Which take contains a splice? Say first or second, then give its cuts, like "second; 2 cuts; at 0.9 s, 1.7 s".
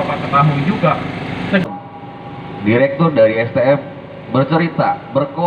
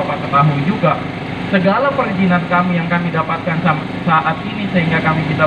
first; 1 cut; at 1.6 s